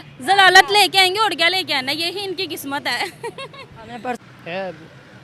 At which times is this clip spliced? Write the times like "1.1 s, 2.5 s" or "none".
4.2 s